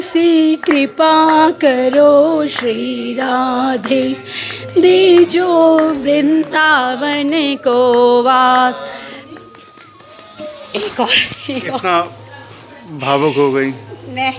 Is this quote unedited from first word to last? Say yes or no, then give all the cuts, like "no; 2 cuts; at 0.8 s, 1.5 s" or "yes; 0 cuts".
yes; 0 cuts